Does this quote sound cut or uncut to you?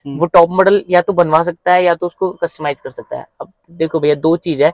uncut